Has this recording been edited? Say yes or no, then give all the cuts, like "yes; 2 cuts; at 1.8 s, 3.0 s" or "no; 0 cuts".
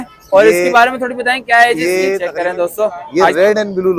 yes; 1 cut; at 2.3 s